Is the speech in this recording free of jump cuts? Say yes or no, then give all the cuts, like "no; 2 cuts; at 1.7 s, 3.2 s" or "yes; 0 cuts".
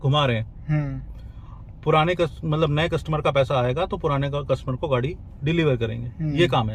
yes; 0 cuts